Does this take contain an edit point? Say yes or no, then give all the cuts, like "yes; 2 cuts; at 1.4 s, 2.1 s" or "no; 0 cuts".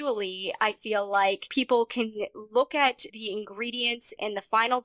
yes; 2 cuts; at 1.4 s, 3.1 s